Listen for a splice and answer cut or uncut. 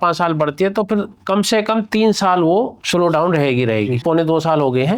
cut